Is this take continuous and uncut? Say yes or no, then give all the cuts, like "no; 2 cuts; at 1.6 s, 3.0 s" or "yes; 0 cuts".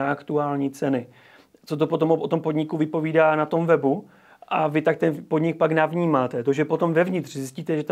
yes; 0 cuts